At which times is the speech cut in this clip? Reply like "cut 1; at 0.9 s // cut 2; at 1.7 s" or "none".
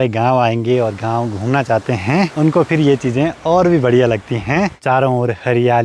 cut 1; at 2.3 s // cut 2; at 4.8 s